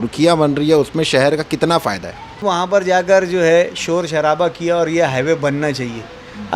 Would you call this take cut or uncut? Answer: cut